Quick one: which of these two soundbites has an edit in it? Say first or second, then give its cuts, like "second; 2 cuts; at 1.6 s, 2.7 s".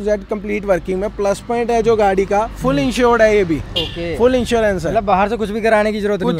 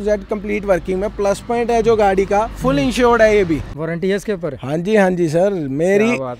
second; 1 cut; at 3.7 s